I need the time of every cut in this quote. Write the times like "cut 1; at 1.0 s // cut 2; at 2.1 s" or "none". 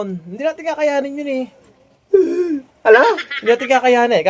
none